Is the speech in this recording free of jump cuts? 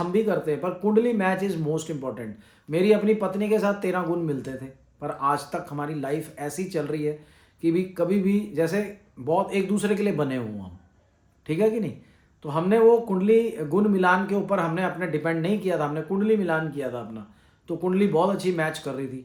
yes; 0 cuts

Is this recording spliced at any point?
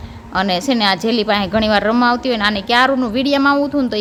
no; 0 cuts

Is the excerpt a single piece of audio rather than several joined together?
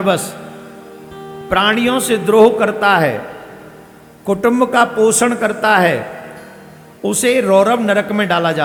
yes; 0 cuts

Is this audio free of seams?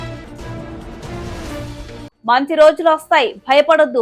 no; 1 cut; at 2.0 s

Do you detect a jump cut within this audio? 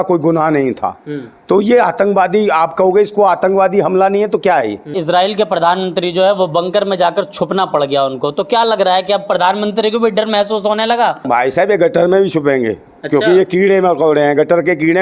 yes; 2 cuts; at 4.9 s, 11.3 s

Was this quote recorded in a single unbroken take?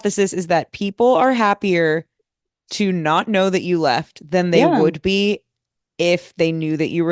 yes; 0 cuts

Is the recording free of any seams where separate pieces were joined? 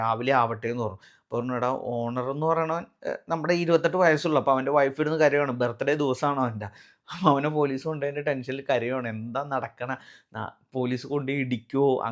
yes; 0 cuts

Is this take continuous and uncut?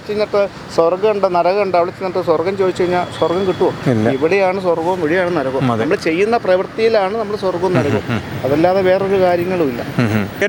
yes; 0 cuts

